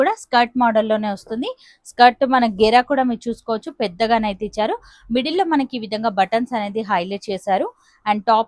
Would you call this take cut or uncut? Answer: uncut